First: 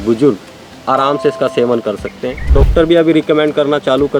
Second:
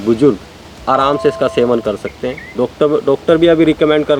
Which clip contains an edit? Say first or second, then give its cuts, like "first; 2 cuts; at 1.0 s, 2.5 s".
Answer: first; 1 cut; at 2.5 s